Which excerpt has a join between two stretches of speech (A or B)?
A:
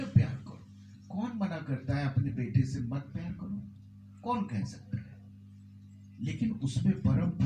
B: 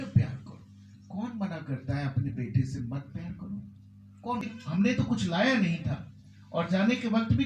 B